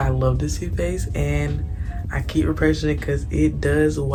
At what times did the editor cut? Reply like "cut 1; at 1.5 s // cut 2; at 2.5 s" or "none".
none